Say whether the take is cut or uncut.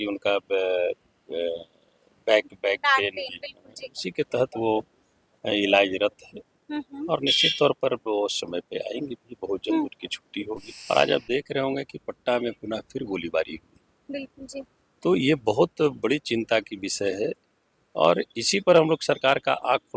cut